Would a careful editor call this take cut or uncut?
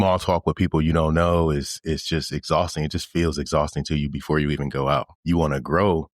cut